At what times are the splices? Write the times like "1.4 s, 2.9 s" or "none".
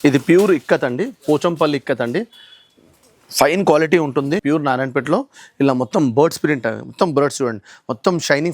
4.4 s